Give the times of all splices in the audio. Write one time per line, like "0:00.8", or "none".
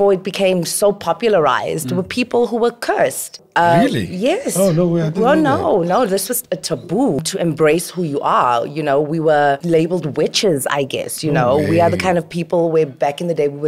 0:03.4
0:07.3
0:09.6